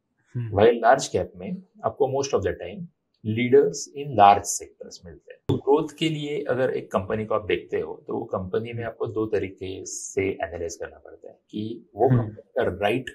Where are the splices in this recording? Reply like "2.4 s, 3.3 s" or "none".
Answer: 5.5 s